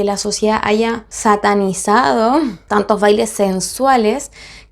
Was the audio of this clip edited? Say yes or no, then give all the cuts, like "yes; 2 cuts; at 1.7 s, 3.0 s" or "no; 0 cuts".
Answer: yes; 2 cuts; at 1.1 s, 2.6 s